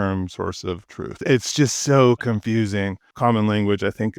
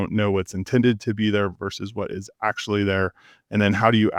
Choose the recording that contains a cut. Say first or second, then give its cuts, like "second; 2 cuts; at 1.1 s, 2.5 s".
first; 2 cuts; at 1.2 s, 3.1 s